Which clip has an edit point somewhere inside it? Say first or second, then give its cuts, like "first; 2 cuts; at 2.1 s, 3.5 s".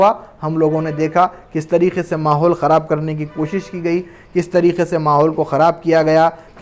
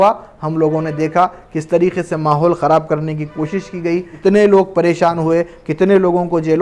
second; 1 cut; at 4.1 s